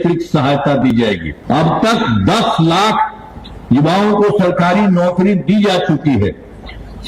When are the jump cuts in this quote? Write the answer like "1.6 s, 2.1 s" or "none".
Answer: 1.3 s